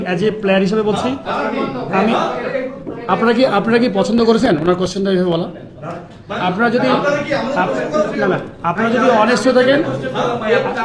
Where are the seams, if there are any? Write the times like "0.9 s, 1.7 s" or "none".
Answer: none